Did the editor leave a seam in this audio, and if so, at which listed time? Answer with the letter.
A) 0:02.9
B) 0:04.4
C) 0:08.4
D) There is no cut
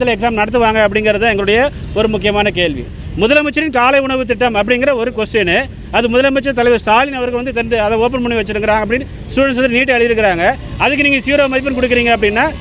A